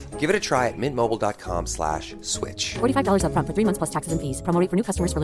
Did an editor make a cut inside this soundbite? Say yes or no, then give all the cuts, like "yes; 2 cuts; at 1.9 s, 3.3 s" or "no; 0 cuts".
no; 0 cuts